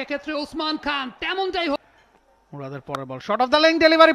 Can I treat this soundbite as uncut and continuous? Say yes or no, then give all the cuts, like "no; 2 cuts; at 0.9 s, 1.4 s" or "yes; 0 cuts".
no; 1 cut; at 1.8 s